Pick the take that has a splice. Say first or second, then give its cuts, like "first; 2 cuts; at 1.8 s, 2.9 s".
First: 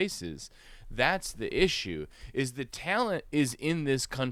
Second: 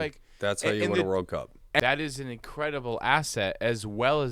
second; 1 cut; at 1.8 s